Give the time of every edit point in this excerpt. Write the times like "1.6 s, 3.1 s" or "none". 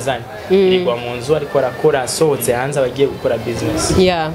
none